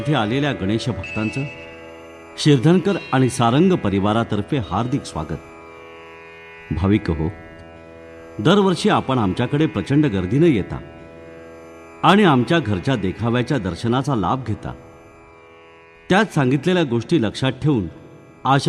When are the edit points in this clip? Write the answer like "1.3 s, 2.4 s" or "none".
none

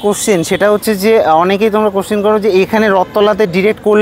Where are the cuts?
none

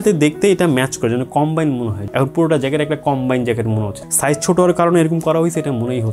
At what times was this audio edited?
2.0 s, 4.0 s

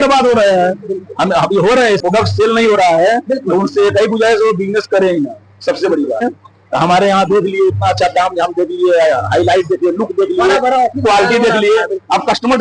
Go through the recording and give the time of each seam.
2.0 s, 6.2 s

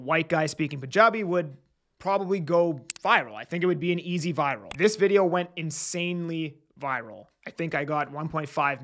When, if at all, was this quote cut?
4.7 s

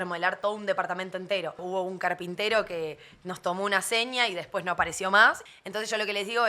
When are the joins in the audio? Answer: 1.6 s, 5.5 s

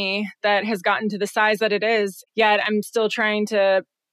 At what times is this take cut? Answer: 2.2 s

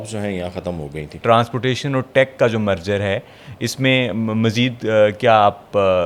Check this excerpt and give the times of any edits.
1.2 s

